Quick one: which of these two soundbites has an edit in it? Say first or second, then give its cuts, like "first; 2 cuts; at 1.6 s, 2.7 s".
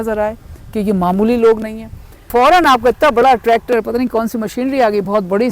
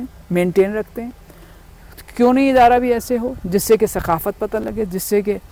first; 1 cut; at 2.3 s